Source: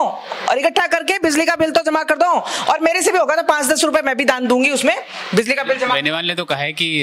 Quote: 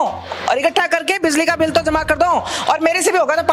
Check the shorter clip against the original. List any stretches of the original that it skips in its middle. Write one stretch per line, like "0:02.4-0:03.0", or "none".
none

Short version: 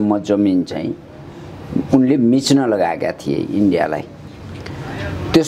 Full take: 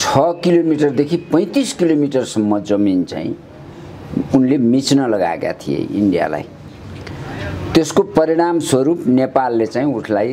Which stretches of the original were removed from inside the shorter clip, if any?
none

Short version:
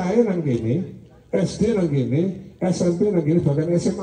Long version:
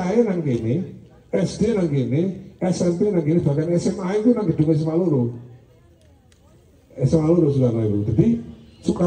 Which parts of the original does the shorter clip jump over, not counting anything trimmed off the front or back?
none

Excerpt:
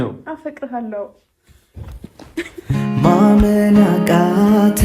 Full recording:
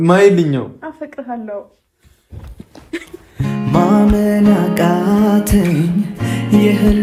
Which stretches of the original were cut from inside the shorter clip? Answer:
0:03.1-0:03.3

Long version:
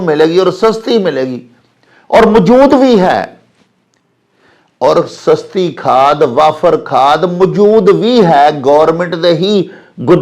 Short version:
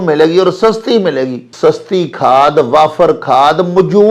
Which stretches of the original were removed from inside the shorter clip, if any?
0:01.5-0:05.1

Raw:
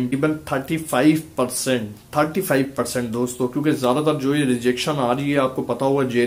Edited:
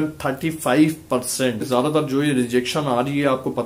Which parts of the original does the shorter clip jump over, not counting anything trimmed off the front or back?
0:01.9-0:03.8

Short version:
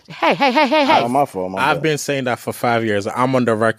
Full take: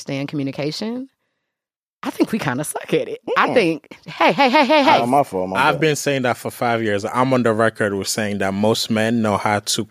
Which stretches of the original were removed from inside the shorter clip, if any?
none

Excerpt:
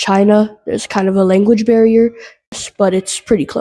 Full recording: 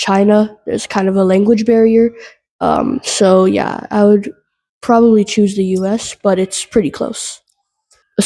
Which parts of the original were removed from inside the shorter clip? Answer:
0:02.6-0:06.0

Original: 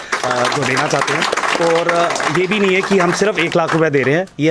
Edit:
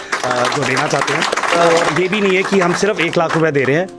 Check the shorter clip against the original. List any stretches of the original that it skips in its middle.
0:01.8-0:02.2

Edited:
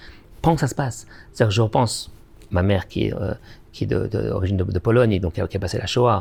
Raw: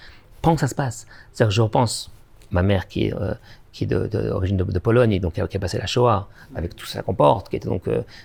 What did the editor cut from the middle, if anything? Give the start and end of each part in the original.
none

